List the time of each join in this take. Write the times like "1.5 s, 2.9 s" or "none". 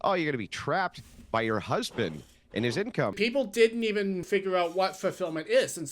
3.1 s, 4.3 s

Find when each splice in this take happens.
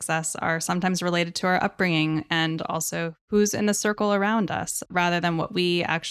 3.2 s, 4.8 s

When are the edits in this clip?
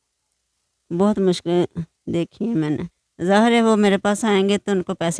3.0 s

